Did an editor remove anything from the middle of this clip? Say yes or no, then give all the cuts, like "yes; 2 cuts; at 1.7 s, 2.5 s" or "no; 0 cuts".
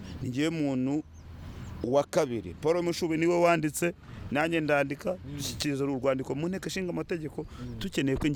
no; 0 cuts